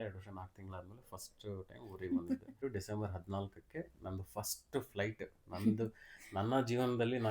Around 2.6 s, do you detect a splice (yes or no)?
yes